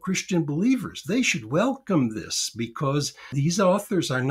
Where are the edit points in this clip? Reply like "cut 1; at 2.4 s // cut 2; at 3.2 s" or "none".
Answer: cut 1; at 3.2 s